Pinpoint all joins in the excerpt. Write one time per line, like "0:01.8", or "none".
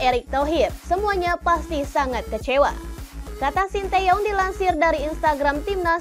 none